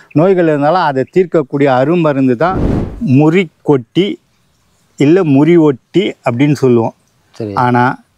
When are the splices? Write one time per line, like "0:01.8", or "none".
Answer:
0:02.7